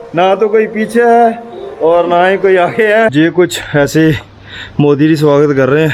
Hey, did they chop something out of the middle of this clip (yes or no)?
yes